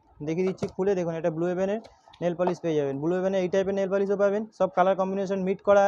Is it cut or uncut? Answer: uncut